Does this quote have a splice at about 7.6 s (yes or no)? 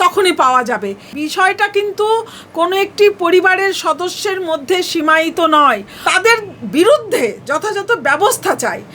no